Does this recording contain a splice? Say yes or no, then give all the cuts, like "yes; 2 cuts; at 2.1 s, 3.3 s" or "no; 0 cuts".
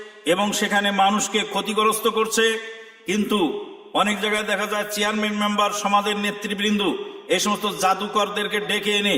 no; 0 cuts